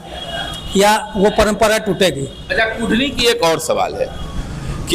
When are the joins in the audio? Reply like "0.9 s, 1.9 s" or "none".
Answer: none